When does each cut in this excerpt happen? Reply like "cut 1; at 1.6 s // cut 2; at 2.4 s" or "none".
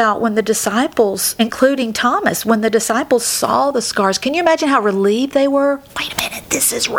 cut 1; at 1.3 s